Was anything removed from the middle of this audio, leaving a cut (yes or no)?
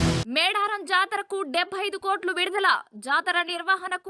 no